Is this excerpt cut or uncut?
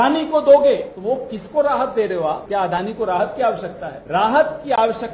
cut